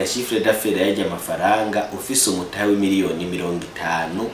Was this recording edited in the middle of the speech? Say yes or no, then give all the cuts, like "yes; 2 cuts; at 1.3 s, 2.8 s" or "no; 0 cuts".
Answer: no; 0 cuts